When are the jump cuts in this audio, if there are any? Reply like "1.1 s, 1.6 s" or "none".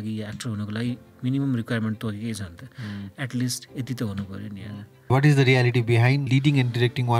5.1 s, 6.2 s